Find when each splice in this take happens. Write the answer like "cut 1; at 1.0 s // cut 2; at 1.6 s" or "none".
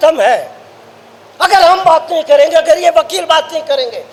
none